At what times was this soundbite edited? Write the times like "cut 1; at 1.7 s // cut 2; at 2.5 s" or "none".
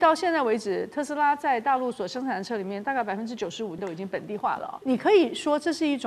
cut 1; at 3.8 s // cut 2; at 4.8 s